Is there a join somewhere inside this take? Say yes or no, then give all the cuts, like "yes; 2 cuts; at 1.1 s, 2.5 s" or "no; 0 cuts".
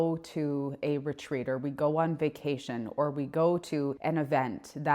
yes; 1 cut; at 4.0 s